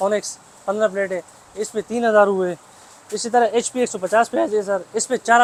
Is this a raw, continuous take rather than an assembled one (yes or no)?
yes